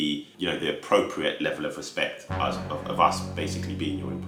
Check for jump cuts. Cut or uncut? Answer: uncut